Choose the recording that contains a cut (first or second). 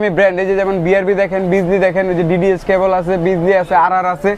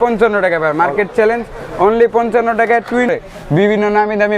second